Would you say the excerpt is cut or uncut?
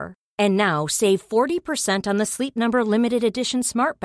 uncut